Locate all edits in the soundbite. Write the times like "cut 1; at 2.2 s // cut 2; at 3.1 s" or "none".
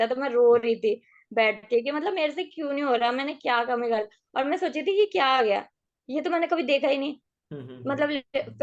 none